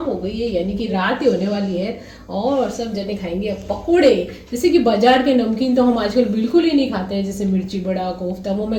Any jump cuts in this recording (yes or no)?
no